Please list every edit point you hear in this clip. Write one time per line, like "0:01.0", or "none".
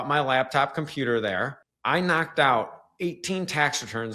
0:01.6